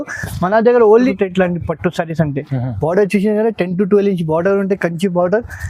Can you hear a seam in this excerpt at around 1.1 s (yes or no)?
yes